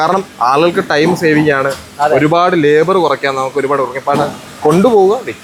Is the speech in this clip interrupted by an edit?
no; 0 cuts

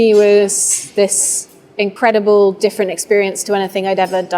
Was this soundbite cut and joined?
yes; 1 cut; at 1.9 s

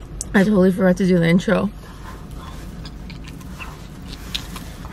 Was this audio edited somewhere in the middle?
no; 0 cuts

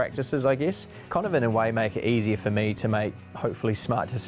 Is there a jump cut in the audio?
no; 0 cuts

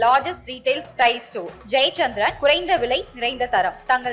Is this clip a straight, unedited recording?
yes; 0 cuts

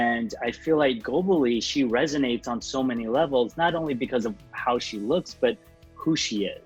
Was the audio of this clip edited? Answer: no; 0 cuts

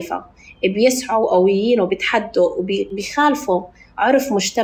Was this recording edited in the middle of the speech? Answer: yes; 1 cut; at 2.9 s

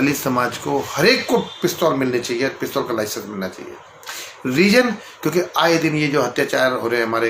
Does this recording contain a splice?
no; 0 cuts

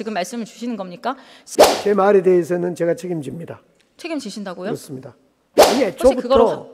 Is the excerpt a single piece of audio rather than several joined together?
no; 2 cuts; at 1.6 s, 5.7 s

